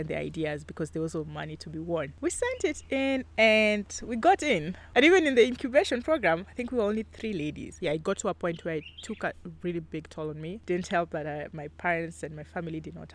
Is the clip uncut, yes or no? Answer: no